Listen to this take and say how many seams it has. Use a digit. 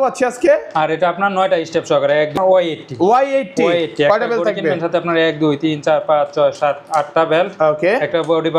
1